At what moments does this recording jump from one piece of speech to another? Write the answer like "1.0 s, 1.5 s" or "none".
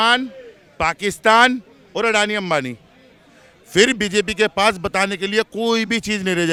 none